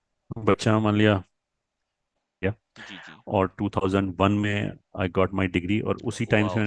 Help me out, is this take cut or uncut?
cut